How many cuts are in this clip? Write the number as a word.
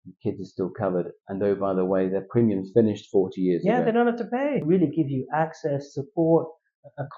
one